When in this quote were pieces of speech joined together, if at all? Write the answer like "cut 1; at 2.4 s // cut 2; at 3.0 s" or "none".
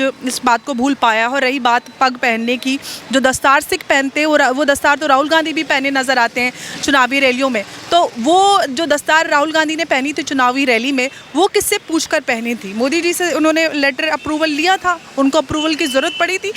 none